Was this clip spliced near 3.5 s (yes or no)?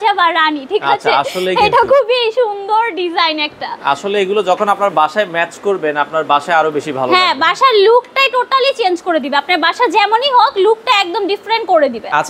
no